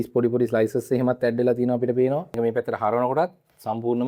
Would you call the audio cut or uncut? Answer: cut